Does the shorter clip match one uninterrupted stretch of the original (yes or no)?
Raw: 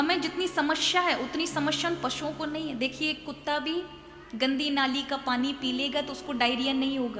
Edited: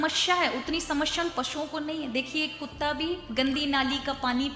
no